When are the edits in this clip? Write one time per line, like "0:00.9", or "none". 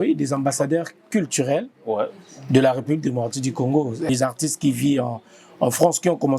0:04.1